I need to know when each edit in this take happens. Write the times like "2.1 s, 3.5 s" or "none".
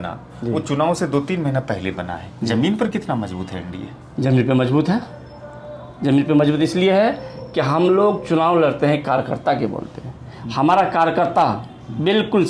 none